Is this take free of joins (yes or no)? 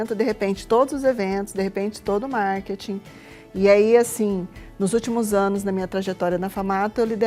yes